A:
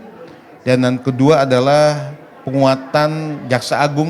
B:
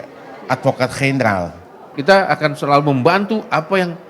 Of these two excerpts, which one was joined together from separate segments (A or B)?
B